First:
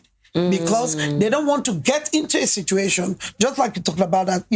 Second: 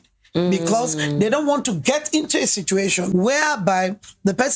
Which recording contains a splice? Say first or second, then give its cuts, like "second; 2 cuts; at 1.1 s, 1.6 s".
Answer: second; 1 cut; at 3.1 s